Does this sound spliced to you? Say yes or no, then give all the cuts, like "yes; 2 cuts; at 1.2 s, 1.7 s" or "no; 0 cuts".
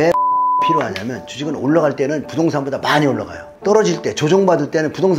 no; 0 cuts